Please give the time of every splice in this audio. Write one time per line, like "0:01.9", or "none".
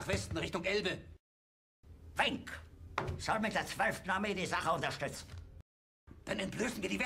0:01.2
0:06.1